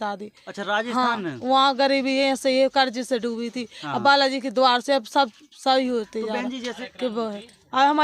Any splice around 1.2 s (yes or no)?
no